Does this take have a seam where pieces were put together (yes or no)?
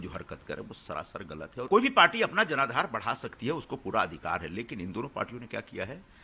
yes